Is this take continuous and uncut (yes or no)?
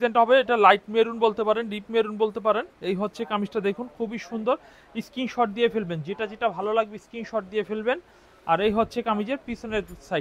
yes